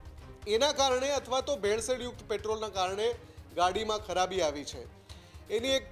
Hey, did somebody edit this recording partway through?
no; 0 cuts

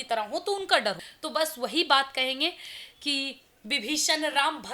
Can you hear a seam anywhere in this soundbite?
yes; 1 cut; at 1.1 s

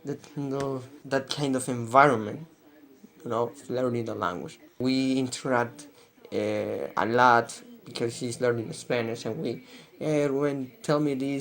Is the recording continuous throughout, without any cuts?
no; 2 cuts; at 0.9 s, 4.8 s

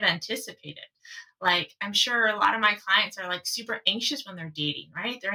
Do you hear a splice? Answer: no; 0 cuts

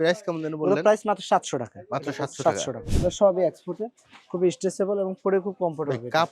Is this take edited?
yes; 1 cut; at 2.8 s

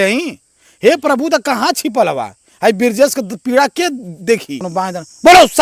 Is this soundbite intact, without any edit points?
no; 1 cut; at 4.6 s

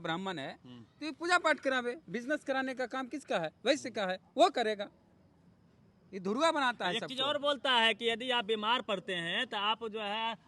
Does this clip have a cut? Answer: no; 0 cuts

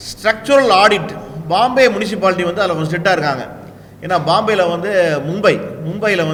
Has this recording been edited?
no; 0 cuts

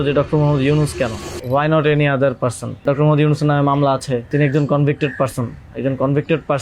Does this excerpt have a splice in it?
yes; 3 cuts; at 1.3 s, 2.8 s, 4.3 s

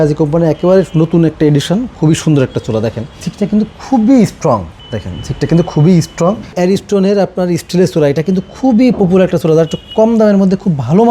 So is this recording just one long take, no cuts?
no; 3 cuts; at 3.2 s, 4.8 s, 6.5 s

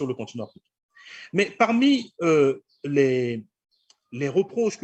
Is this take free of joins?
yes; 0 cuts

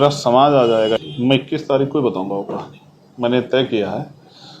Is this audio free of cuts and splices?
no; 1 cut; at 1.1 s

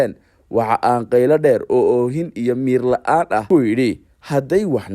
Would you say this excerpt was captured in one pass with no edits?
no; 1 cut; at 3.6 s

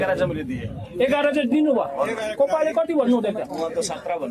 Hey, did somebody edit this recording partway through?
no; 0 cuts

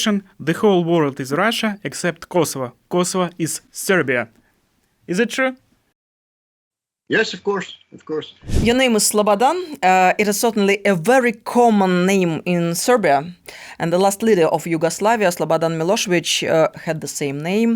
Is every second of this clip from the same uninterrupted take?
no; 1 cut; at 8.4 s

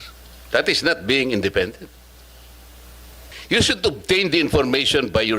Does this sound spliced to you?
yes; 1 cut; at 3.3 s

